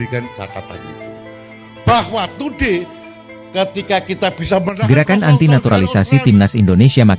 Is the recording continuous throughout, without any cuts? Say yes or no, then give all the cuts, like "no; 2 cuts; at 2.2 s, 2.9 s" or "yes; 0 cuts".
no; 1 cut; at 4.7 s